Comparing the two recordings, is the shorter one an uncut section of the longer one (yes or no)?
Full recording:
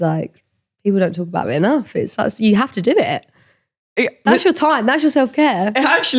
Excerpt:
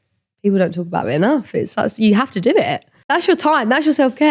no